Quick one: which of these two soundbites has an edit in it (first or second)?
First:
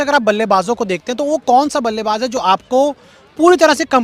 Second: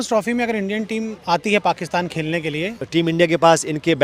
second